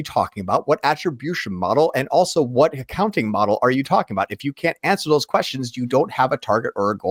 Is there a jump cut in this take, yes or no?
no